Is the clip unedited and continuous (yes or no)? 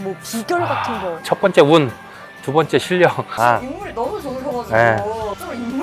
no